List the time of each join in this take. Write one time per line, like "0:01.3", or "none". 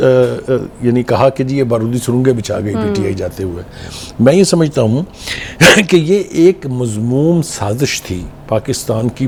none